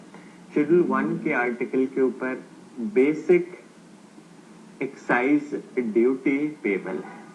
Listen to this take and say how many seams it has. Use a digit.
2